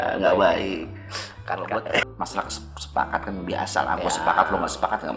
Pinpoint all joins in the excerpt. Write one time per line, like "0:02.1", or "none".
0:02.0